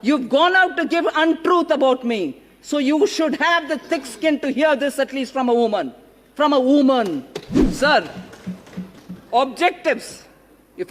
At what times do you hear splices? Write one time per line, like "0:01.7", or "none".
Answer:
none